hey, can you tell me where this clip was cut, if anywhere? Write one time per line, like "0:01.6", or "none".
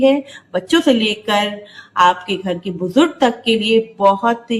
none